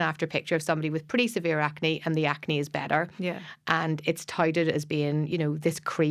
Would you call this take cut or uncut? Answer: uncut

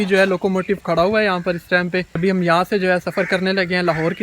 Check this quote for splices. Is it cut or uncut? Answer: cut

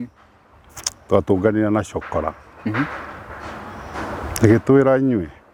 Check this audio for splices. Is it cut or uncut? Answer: uncut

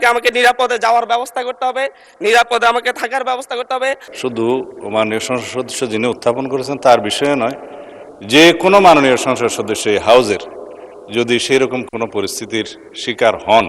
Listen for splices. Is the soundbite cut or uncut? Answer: cut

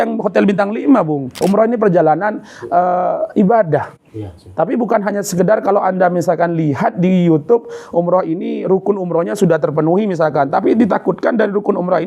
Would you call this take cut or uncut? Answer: cut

